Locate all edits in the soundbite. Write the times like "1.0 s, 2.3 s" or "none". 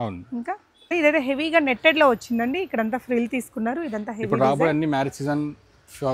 0.9 s